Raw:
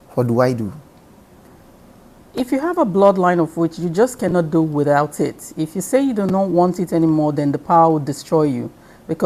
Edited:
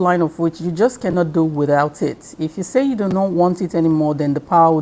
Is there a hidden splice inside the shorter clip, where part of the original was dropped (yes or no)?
no